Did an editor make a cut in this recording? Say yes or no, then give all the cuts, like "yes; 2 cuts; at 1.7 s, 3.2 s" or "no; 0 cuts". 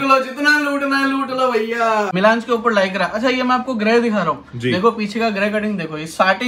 yes; 1 cut; at 2.1 s